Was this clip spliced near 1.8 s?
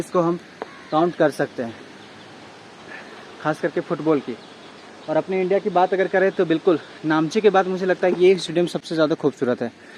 no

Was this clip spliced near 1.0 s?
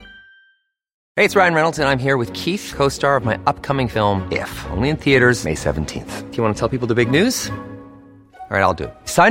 yes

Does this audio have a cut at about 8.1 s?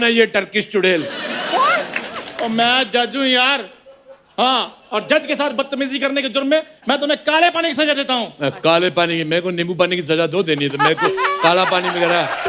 no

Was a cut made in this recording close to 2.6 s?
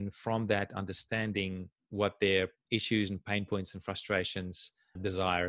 yes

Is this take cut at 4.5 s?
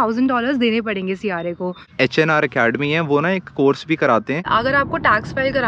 yes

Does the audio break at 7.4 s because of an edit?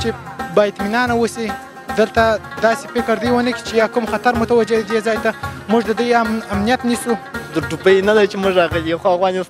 yes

